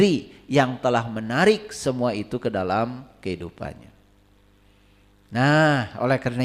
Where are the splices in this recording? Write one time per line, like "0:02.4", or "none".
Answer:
none